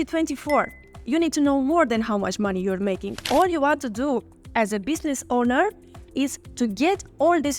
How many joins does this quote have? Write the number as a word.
one